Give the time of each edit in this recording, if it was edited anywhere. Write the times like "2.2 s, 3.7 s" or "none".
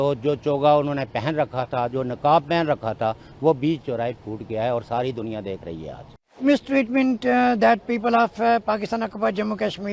6.4 s

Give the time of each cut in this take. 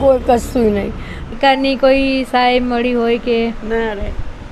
1.3 s

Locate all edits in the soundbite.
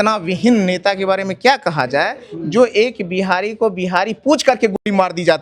none

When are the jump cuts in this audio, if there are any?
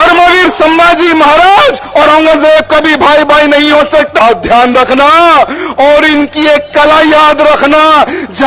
4.2 s

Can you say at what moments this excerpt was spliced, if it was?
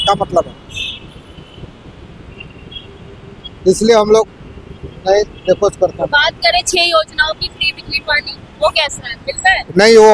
none

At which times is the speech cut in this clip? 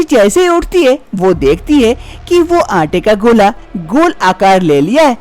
none

